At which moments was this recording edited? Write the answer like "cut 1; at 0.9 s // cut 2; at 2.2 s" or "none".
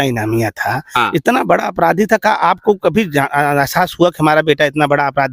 none